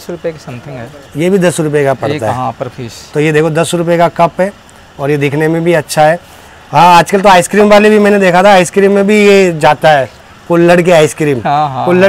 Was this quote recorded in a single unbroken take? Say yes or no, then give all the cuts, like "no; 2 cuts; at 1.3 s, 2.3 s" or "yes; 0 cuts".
yes; 0 cuts